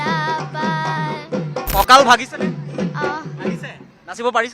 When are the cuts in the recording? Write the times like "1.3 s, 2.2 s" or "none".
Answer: 1.7 s